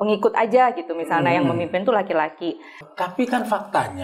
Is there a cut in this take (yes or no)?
yes